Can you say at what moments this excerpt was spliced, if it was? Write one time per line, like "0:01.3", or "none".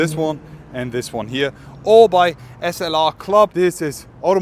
0:03.5

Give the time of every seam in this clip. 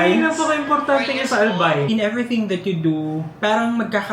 0:01.9

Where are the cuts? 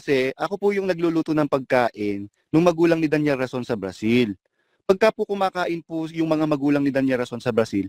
none

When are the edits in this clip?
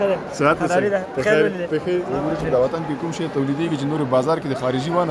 0:02.1

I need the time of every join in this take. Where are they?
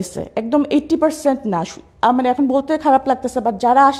none

